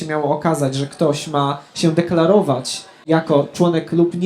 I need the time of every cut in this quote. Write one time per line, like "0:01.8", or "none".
none